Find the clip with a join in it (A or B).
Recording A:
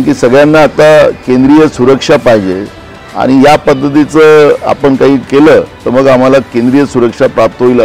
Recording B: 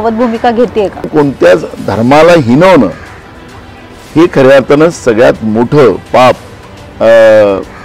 B